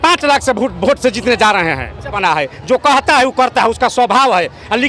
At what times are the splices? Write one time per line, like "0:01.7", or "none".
0:02.1